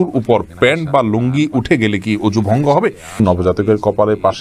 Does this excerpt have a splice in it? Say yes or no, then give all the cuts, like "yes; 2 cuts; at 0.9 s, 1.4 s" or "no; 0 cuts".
yes; 1 cut; at 3.2 s